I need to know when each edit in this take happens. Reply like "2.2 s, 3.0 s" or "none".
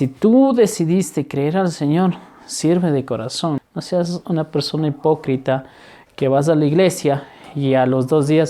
3.6 s